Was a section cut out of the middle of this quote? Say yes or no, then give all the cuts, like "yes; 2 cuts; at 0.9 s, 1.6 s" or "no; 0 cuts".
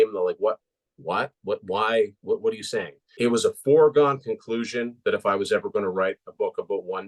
yes; 1 cut; at 3.0 s